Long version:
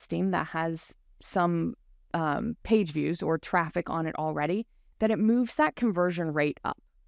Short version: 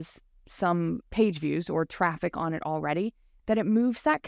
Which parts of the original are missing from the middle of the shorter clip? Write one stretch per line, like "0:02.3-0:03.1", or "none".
0:01.8-0:02.6